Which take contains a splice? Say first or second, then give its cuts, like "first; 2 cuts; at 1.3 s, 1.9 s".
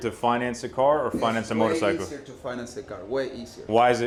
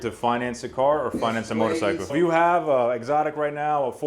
second; 1 cut; at 2.1 s